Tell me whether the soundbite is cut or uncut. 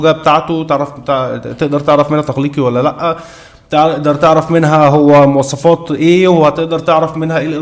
uncut